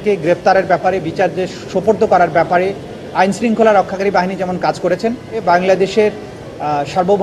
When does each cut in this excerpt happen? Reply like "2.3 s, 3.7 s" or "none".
5.4 s